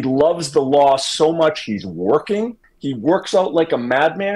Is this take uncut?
yes; 0 cuts

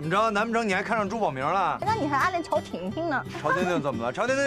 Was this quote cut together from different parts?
yes; 1 cut; at 1.8 s

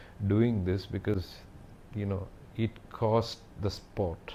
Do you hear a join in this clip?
no; 0 cuts

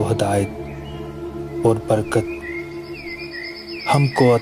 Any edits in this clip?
no; 0 cuts

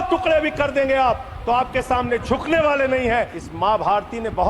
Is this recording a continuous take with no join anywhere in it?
no; 1 cut; at 3.3 s

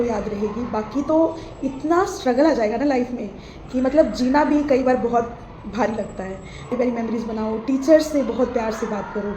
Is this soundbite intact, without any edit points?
no; 1 cut; at 6.7 s

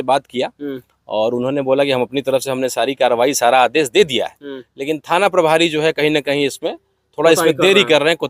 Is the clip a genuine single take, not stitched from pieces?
yes; 0 cuts

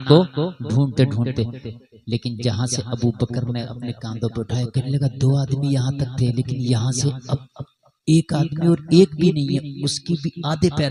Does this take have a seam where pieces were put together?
no; 0 cuts

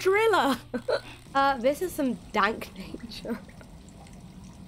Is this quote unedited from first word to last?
no; 1 cut; at 1.2 s

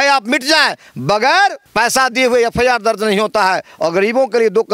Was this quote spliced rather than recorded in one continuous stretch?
yes; 1 cut; at 1.6 s

